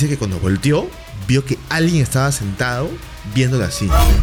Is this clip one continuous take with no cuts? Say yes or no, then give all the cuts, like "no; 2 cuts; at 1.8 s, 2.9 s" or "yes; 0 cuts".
yes; 0 cuts